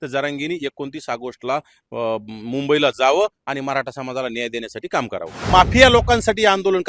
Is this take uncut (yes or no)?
no